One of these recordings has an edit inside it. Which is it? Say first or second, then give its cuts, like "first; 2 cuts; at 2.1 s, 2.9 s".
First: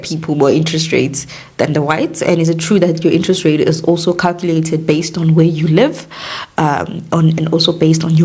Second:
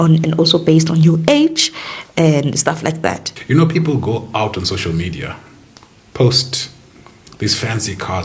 second; 1 cut; at 3.3 s